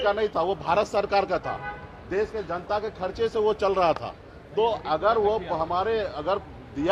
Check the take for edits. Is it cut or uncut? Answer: uncut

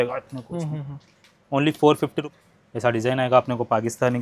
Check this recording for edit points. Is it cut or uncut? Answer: cut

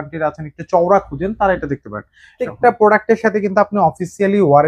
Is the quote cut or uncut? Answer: cut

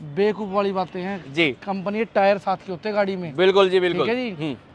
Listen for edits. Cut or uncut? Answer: uncut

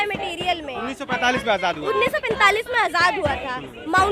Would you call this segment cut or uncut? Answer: uncut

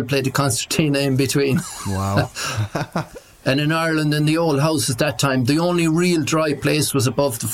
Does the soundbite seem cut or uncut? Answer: cut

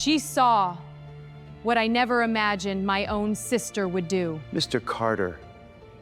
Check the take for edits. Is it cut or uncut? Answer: cut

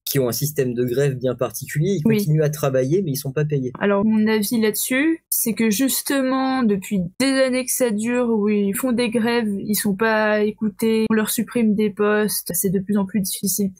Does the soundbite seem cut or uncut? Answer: cut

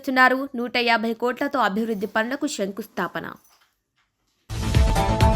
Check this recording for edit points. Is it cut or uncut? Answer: uncut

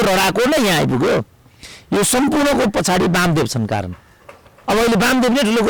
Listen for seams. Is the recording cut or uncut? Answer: uncut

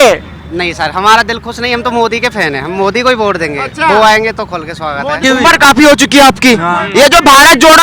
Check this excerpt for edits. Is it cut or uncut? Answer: cut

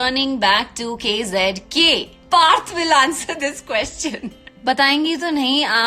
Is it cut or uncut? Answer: cut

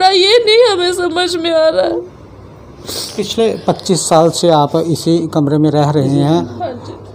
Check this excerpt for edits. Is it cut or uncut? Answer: uncut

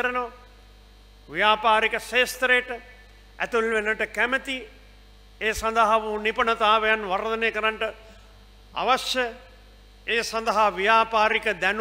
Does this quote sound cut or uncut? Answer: uncut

